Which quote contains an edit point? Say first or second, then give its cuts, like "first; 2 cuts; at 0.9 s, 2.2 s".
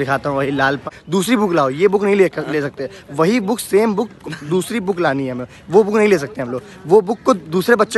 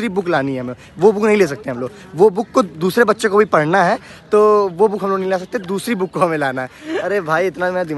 first; 1 cut; at 1.0 s